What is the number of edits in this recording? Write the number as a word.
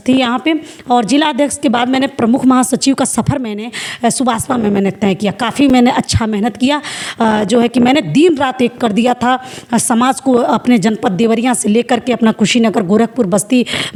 zero